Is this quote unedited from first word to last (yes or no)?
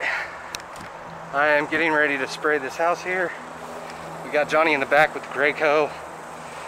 yes